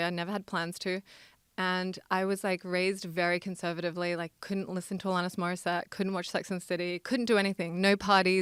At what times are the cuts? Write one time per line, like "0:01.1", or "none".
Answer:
none